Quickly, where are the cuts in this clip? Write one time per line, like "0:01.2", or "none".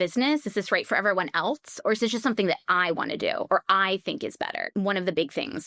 0:04.3

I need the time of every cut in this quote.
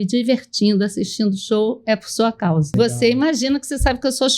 0:02.7

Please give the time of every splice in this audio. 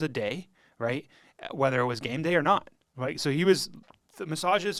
none

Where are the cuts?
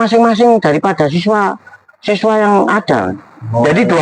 none

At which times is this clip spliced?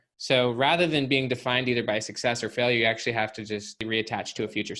0:03.8

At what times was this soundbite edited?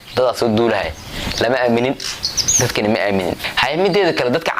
0:03.5

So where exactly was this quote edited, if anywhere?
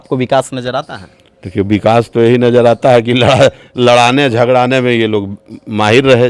none

